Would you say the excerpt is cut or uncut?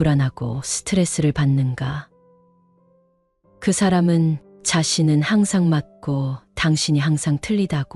uncut